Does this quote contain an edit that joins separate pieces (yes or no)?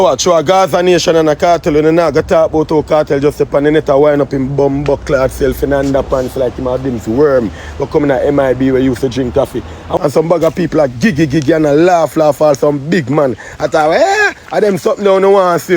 yes